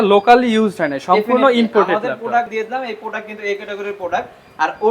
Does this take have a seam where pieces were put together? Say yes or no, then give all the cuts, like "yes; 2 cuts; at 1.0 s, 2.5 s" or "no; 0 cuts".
yes; 1 cut; at 2.5 s